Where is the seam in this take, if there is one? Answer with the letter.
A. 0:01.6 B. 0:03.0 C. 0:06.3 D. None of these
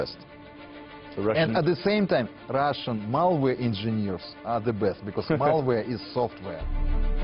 C